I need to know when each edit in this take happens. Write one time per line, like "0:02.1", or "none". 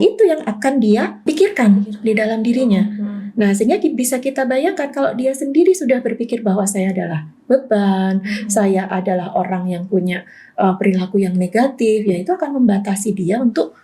0:01.2